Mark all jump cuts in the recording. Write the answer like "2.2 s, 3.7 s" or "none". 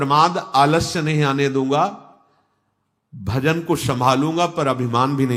none